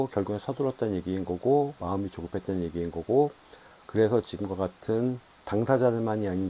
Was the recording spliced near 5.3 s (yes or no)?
yes